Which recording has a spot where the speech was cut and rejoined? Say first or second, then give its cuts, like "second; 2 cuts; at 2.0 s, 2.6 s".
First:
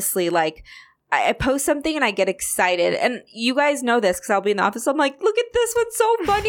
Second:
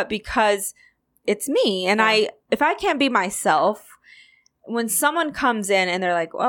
second; 1 cut; at 2.4 s